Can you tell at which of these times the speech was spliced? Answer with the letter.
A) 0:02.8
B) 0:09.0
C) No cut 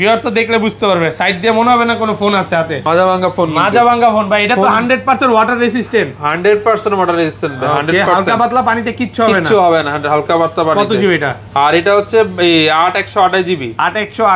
A